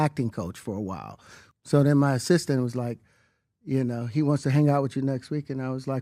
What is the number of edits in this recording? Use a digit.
1